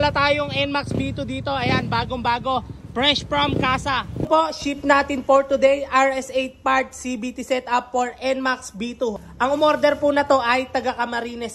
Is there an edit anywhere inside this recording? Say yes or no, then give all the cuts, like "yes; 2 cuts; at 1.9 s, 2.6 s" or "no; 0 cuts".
yes; 2 cuts; at 4.2 s, 9.2 s